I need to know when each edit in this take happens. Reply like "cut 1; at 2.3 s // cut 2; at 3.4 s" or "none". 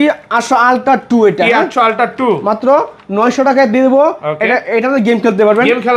none